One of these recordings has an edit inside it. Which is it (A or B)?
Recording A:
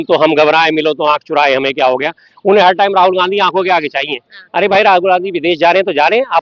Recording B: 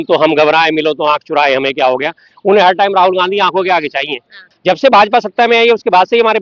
B